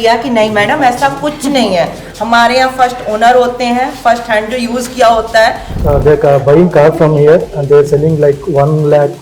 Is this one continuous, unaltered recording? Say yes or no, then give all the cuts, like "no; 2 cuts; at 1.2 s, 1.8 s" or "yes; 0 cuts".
no; 1 cut; at 5.8 s